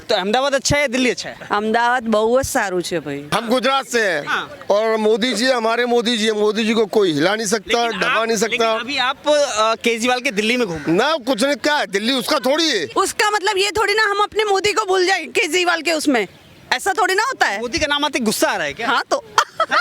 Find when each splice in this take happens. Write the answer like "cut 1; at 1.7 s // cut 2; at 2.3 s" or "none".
cut 1; at 1.3 s // cut 2; at 3.2 s // cut 3; at 12.9 s